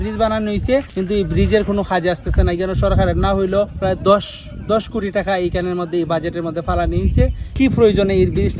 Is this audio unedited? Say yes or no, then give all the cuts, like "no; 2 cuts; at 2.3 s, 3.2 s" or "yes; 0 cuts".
no; 3 cuts; at 0.9 s, 3.7 s, 7.5 s